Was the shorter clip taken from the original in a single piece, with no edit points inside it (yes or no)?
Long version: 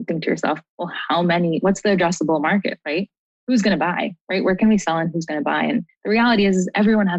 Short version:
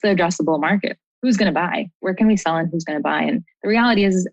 no